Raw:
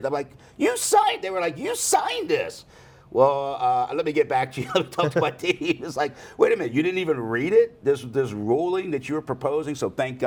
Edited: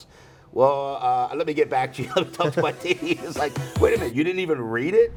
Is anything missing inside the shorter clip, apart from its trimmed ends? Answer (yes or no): no